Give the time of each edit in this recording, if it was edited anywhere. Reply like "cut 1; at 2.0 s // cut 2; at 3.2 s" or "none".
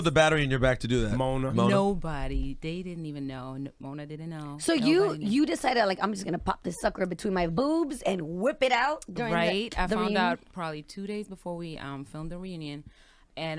cut 1; at 1.1 s